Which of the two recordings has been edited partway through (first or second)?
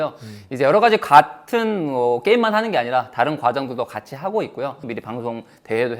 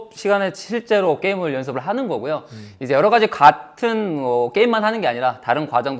first